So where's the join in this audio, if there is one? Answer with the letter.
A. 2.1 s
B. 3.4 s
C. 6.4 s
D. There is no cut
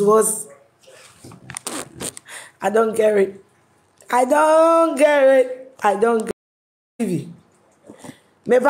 C